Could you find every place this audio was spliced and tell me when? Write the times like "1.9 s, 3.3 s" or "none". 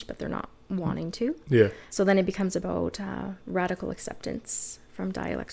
1.8 s